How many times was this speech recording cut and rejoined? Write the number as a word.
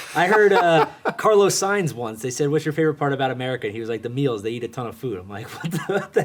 zero